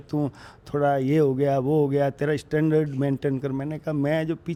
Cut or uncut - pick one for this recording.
uncut